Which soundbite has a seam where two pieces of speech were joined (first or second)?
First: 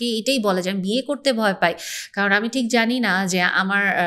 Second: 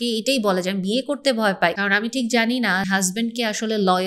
second